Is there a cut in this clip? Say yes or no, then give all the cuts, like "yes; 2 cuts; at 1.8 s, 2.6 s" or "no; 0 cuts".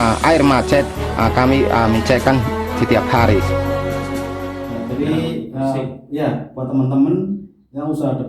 yes; 1 cut; at 4.8 s